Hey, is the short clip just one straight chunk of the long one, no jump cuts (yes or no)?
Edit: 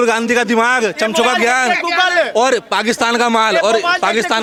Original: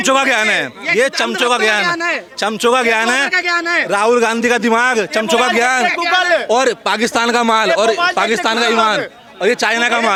yes